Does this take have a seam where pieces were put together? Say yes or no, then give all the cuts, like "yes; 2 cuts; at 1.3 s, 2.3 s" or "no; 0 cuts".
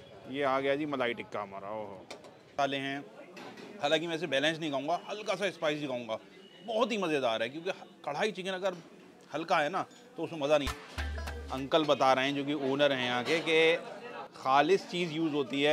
yes; 2 cuts; at 2.5 s, 10.7 s